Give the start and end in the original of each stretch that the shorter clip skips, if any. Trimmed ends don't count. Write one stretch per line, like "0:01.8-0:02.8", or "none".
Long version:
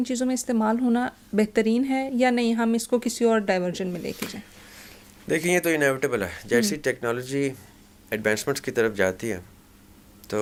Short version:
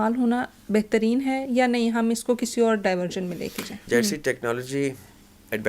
0:04.4-0:06.4